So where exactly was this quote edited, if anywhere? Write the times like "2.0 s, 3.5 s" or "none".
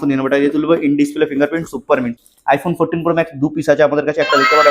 2.1 s